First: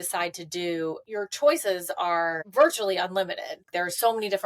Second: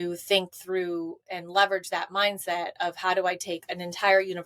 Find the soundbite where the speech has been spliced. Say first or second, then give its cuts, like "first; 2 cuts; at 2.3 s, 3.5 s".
first; 3 cuts; at 1.0 s, 2.4 s, 3.7 s